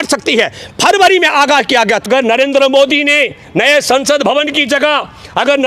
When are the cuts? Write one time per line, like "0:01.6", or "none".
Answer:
0:02.1